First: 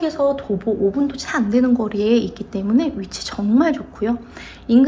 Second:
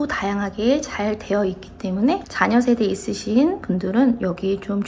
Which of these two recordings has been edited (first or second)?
second